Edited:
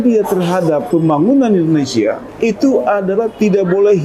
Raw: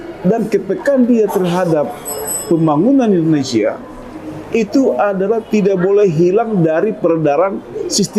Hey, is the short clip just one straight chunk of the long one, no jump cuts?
no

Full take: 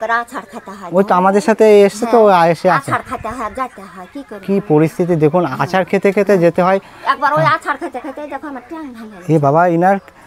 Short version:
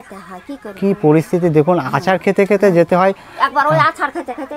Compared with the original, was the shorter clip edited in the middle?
no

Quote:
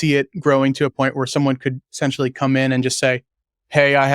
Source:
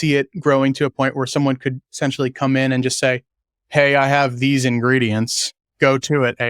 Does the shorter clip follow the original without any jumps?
yes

